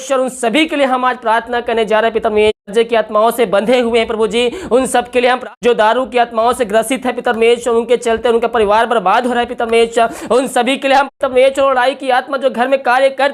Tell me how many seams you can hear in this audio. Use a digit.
3